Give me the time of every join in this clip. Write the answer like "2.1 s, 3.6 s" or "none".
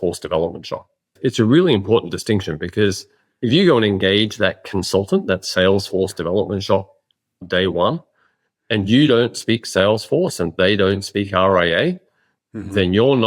1.1 s